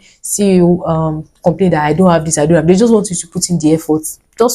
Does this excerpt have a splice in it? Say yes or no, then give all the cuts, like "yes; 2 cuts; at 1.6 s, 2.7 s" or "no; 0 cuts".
no; 0 cuts